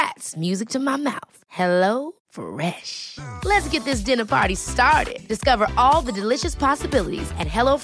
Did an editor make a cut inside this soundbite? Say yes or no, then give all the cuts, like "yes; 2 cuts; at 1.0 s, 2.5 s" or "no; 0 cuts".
no; 0 cuts